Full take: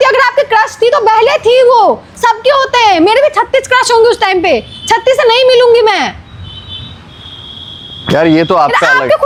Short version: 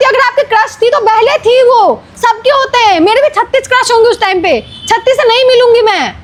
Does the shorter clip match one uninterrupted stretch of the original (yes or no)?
yes